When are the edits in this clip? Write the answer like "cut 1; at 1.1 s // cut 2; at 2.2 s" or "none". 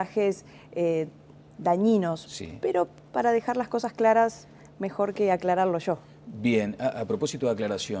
cut 1; at 3.8 s

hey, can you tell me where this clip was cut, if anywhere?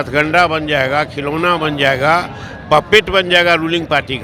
none

